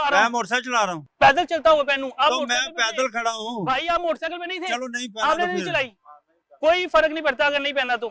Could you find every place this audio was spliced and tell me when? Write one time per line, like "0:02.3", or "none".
none